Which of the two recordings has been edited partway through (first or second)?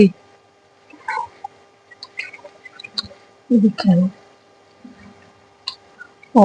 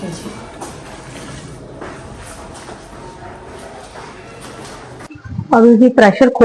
second